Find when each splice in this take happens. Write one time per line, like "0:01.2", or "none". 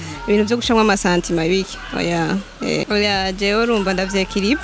0:02.8